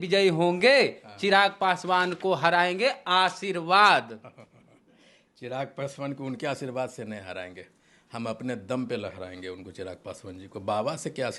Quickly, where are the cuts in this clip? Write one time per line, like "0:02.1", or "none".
none